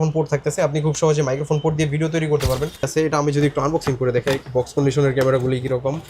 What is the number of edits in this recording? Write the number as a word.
one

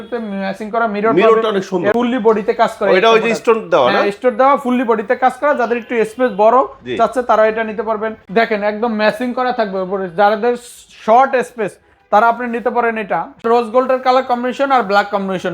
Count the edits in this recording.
three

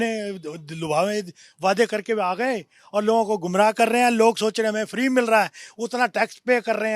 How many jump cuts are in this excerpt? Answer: zero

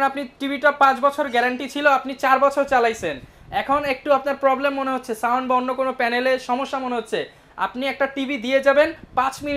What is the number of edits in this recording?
zero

